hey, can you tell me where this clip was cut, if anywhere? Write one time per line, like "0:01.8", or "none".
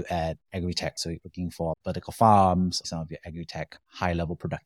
0:02.8